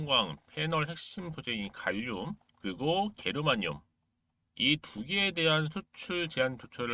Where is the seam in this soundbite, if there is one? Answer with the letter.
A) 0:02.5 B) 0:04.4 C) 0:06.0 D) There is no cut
A